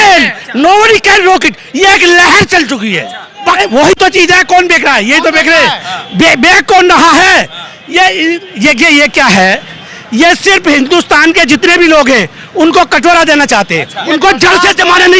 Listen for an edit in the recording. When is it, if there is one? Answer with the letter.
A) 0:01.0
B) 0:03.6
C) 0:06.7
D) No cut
B